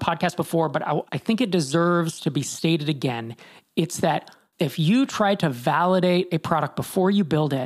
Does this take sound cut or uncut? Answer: cut